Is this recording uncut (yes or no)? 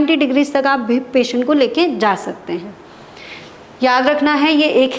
yes